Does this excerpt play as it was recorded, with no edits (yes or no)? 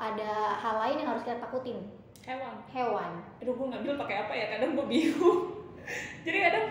no